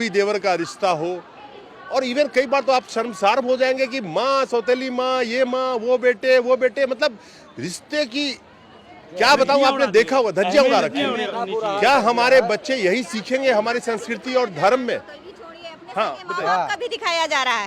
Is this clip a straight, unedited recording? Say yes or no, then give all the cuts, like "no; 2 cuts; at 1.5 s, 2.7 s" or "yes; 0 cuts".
yes; 0 cuts